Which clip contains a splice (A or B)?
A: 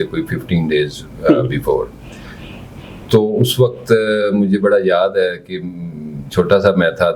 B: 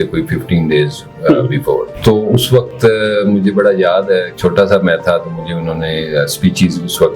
B